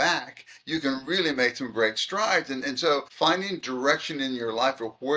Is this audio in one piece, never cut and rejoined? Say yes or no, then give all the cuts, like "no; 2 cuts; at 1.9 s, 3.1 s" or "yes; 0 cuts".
no; 1 cut; at 3.1 s